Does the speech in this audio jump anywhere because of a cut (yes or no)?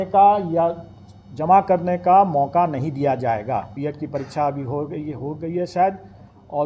yes